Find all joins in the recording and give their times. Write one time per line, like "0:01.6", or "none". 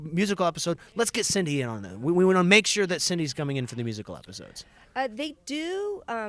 none